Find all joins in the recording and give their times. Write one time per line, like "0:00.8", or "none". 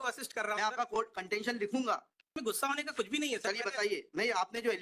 0:02.3